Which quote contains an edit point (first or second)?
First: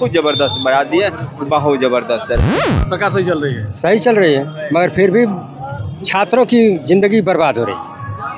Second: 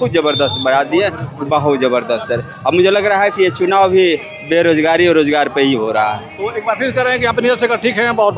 first